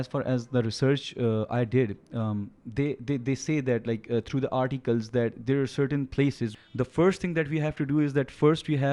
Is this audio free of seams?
no; 1 cut; at 6.5 s

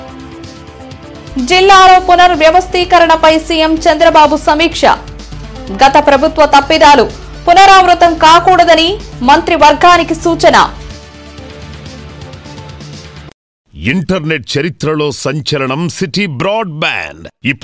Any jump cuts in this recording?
yes; 1 cut; at 13.6 s

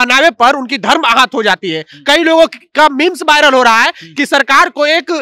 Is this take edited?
no; 0 cuts

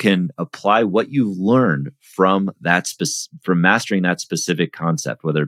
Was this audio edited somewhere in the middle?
no; 0 cuts

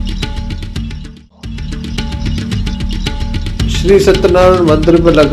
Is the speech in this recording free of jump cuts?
no; 1 cut; at 1.8 s

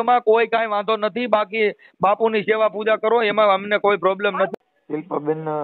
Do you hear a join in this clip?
yes; 1 cut; at 4.5 s

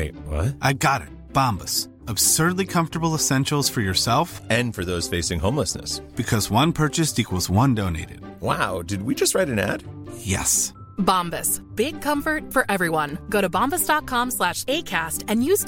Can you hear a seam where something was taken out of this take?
no; 0 cuts

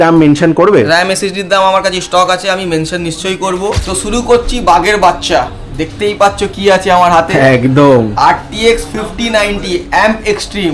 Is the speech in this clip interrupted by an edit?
yes; 1 cut; at 3.8 s

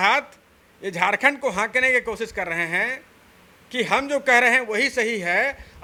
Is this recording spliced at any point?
no; 0 cuts

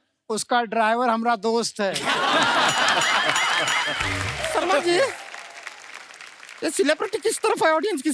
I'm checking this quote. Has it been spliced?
yes; 1 cut; at 4.3 s

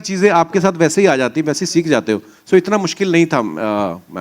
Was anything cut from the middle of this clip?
no; 0 cuts

